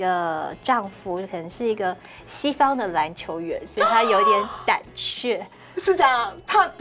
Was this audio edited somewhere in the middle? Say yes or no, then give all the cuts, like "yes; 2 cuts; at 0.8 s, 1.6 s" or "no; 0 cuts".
no; 0 cuts